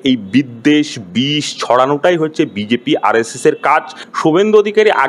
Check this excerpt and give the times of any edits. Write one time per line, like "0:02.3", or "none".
0:04.0